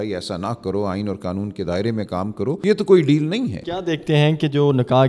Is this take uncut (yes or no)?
no